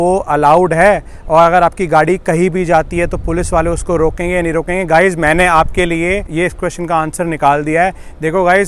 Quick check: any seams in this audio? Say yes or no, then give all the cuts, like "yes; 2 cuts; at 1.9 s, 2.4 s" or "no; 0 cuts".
no; 0 cuts